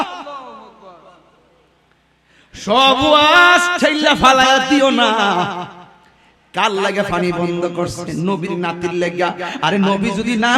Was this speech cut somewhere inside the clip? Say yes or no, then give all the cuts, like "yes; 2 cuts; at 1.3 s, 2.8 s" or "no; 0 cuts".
no; 0 cuts